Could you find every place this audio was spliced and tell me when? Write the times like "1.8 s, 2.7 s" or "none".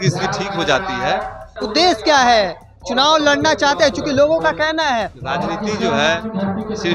1.5 s, 5.2 s